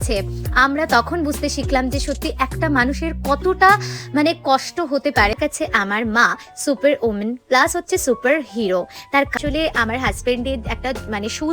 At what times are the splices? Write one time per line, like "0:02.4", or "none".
0:05.4
0:09.4